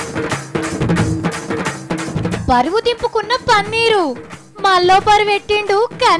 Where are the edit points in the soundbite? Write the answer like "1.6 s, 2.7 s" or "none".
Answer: 1.0 s